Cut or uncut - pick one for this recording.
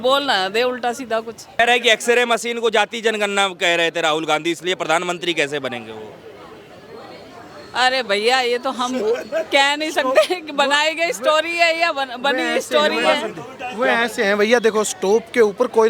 uncut